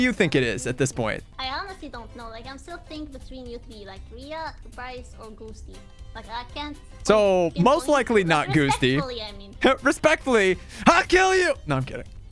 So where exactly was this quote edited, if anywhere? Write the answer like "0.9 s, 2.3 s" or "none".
1.3 s